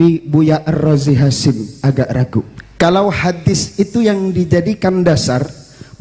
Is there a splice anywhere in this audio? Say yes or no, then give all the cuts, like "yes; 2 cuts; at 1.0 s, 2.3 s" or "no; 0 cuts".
yes; 1 cut; at 2.6 s